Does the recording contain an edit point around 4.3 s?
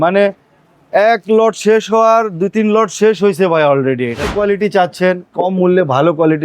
yes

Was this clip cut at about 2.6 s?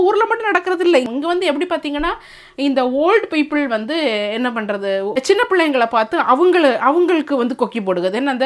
no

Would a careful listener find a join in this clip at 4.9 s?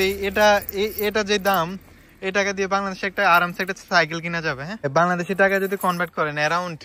yes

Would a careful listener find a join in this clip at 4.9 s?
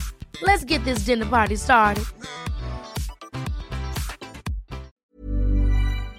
yes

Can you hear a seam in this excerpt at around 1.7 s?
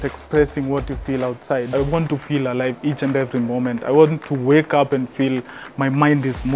yes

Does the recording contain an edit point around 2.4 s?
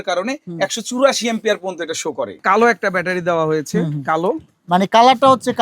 yes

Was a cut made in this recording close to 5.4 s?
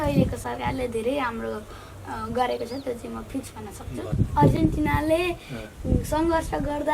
no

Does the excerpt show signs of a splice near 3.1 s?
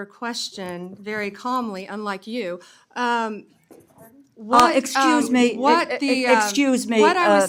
no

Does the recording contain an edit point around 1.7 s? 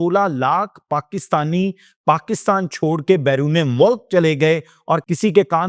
no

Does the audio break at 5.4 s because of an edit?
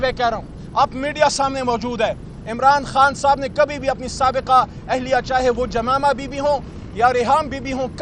no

